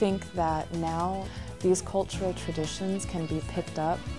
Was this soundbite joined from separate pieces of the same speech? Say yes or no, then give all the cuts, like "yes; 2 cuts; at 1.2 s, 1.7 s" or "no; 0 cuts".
yes; 1 cut; at 1.3 s